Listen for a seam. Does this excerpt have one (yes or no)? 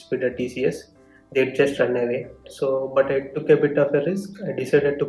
yes